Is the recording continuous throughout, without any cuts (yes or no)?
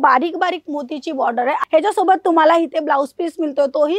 no